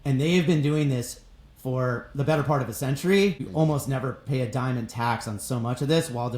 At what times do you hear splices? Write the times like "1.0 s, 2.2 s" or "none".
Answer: 3.5 s